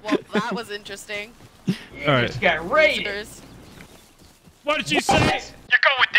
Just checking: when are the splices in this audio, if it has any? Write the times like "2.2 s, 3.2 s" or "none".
none